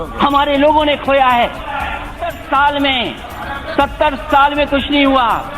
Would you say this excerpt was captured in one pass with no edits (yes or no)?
no